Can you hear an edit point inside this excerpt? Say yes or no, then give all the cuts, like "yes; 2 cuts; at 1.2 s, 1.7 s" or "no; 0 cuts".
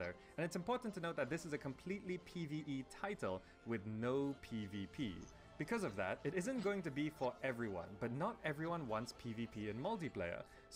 yes; 1 cut; at 2.0 s